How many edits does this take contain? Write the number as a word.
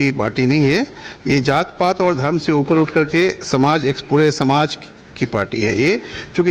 zero